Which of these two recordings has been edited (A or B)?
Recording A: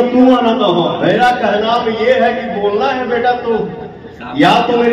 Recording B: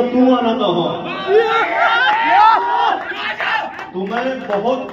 A